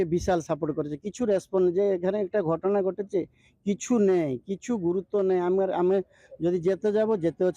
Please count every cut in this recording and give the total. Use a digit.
0